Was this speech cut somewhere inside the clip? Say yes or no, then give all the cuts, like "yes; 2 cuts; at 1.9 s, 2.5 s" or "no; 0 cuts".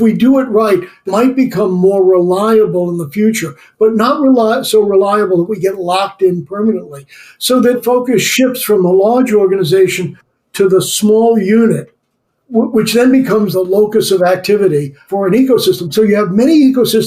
no; 0 cuts